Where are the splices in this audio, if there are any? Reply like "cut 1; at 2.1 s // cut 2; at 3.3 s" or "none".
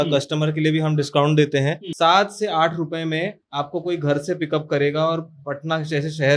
cut 1; at 1.8 s